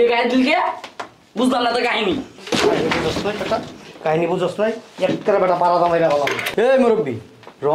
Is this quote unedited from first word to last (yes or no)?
no